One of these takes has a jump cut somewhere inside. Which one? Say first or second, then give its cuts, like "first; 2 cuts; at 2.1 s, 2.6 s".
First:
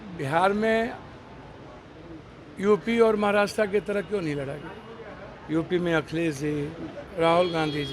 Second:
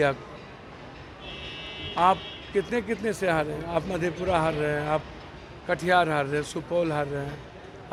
first; 1 cut; at 7.0 s